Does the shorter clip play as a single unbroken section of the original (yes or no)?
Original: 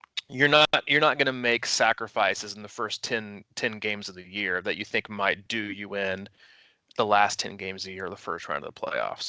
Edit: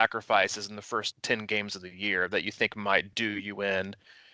no